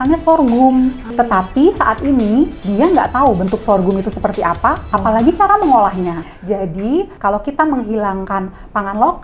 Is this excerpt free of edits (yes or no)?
no